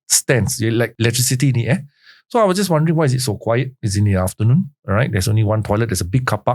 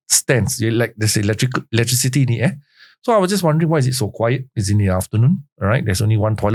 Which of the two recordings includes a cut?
first; 1 cut; at 0.9 s

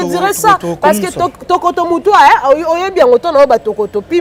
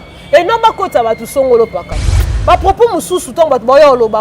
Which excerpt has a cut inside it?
second; 1 cut; at 2.3 s

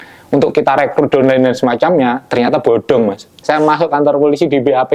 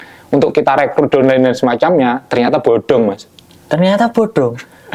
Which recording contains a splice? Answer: first; 1 cut; at 3.4 s

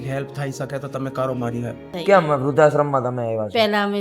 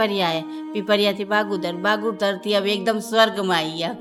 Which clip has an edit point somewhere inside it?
first; 1 cut; at 1.8 s

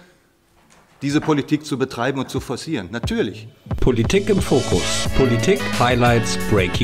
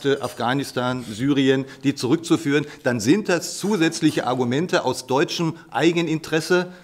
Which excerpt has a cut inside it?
first; 1 cut; at 3.6 s

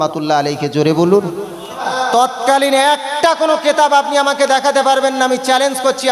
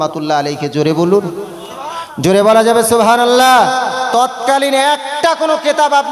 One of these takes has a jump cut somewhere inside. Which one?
first; 1 cut; at 1.9 s

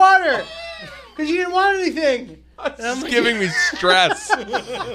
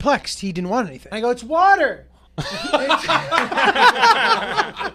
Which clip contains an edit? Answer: second; 1 cut; at 1.0 s

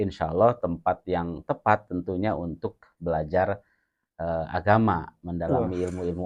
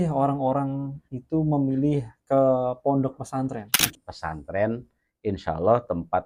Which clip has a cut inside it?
second; 1 cut; at 3.8 s

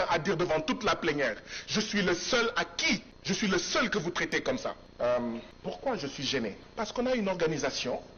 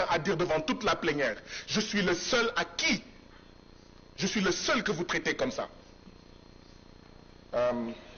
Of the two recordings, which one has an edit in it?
first; 4 cuts; at 3.1 s, 4.9 s, 5.5 s, 6.6 s

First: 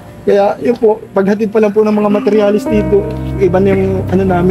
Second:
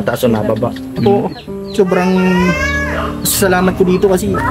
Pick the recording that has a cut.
second; 1 cut; at 1.0 s

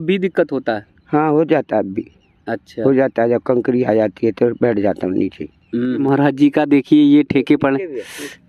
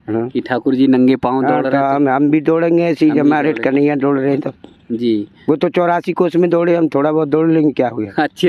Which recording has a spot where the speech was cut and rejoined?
first; 1 cut; at 6.0 s

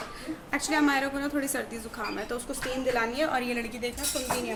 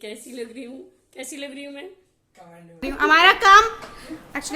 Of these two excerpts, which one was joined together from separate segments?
second; 1 cut; at 2.8 s

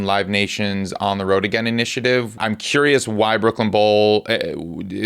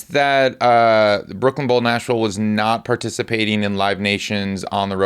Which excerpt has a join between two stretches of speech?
first; 1 cut; at 2.4 s

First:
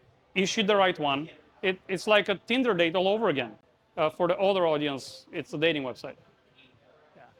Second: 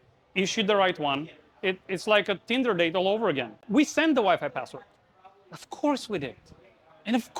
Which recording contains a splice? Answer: second; 1 cut; at 3.5 s

